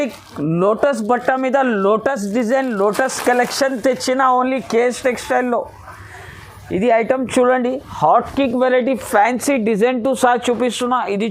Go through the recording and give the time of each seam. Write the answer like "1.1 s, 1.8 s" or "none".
none